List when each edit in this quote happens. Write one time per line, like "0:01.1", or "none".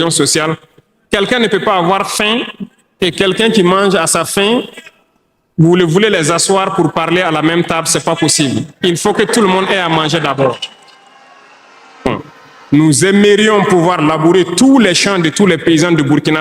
0:12.1